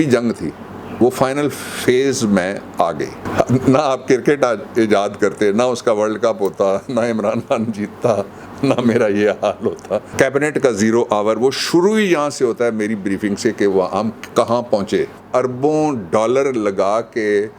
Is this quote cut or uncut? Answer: cut